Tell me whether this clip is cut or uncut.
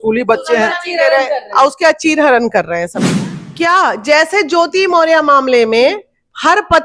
cut